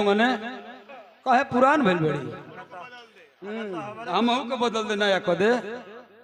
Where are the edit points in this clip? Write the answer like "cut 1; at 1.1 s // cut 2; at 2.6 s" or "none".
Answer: none

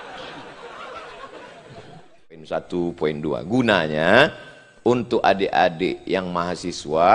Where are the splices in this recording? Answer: cut 1; at 2.4 s

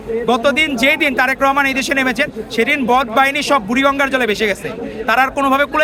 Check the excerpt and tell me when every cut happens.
none

